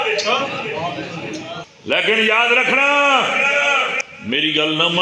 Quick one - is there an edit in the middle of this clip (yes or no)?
yes